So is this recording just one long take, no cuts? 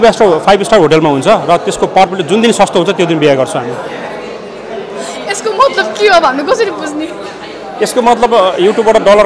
yes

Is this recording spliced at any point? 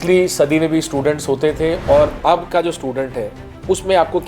yes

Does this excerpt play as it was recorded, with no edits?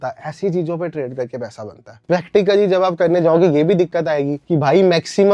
yes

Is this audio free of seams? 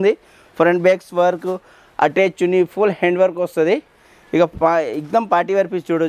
yes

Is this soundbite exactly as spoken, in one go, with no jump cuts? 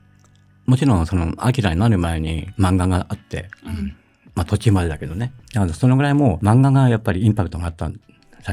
no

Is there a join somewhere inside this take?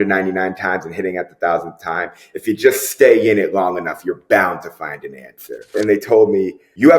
yes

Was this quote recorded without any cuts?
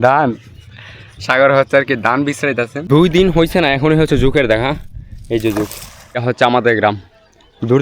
no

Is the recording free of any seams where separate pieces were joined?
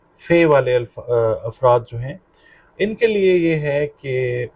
yes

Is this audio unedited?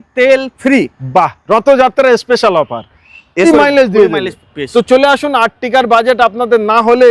no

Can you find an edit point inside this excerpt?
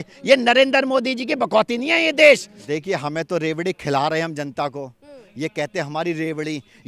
yes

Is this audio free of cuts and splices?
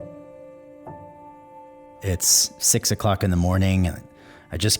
no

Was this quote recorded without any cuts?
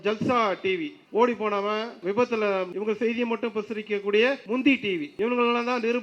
no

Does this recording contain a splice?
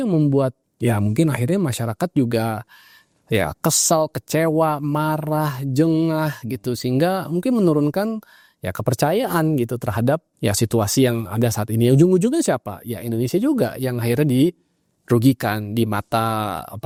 no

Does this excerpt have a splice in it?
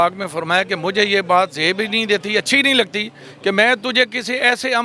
no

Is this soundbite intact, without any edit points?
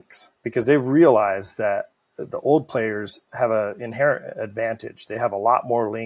yes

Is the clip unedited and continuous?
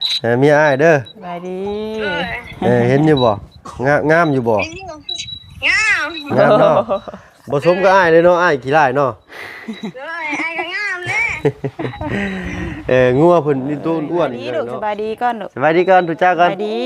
no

